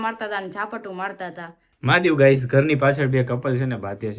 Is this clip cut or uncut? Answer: cut